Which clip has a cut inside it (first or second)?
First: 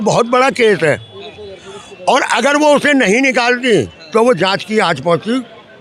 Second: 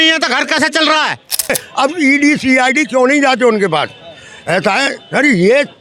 second